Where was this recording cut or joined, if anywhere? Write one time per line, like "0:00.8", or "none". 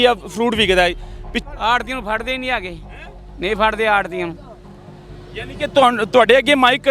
0:01.3